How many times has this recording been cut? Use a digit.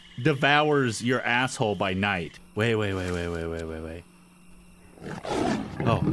1